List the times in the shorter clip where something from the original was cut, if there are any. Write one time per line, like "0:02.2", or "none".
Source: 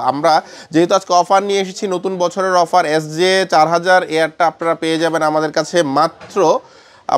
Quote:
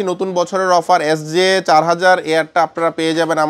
none